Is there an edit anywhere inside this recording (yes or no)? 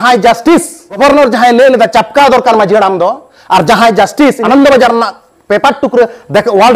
yes